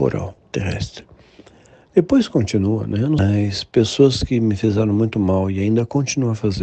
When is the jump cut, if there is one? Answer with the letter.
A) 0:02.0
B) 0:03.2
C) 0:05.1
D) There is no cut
B